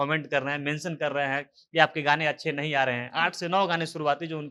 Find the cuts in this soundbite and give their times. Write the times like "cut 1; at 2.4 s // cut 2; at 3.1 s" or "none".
none